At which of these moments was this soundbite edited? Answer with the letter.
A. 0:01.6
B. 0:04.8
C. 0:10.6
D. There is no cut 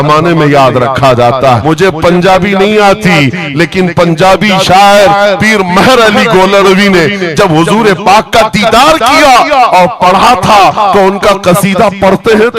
A